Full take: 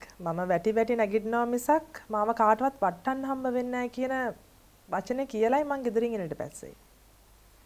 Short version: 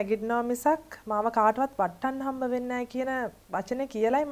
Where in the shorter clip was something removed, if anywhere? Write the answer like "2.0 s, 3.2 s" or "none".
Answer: 3.4 s